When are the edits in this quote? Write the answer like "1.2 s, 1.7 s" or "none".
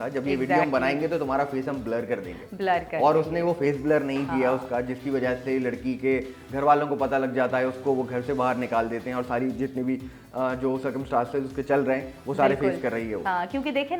none

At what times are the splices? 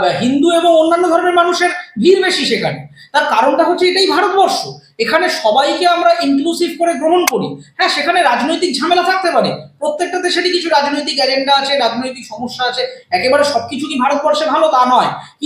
none

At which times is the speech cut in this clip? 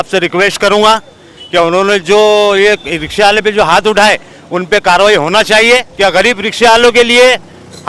5.9 s

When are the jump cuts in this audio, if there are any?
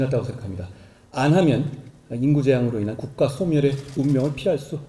3.9 s

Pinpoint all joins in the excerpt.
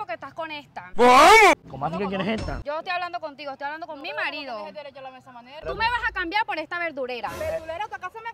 2.6 s, 5.6 s

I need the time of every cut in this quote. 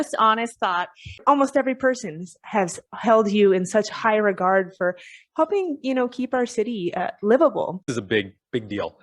1.2 s, 7.9 s

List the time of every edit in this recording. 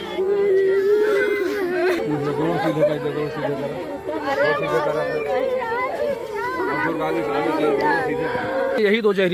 none

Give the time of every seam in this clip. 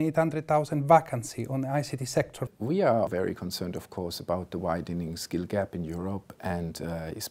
2.5 s

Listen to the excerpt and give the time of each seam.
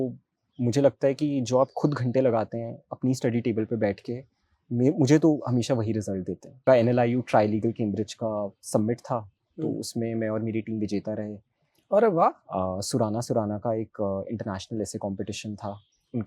6.6 s

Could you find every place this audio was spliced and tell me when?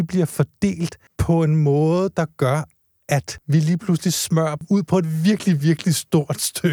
1.1 s, 3.3 s, 4.6 s

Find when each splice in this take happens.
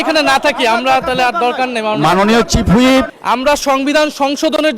3.1 s

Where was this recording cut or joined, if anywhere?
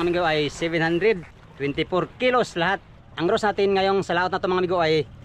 3.0 s

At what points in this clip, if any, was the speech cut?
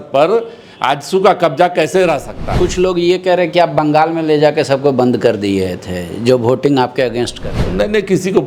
2.5 s

